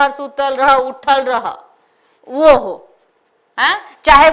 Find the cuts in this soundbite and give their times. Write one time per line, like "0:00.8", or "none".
none